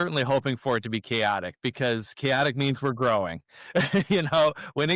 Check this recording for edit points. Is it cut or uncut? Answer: uncut